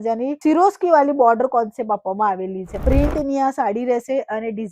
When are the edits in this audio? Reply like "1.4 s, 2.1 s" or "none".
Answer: 2.7 s